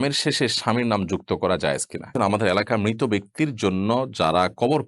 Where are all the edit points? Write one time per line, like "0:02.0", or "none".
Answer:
0:02.1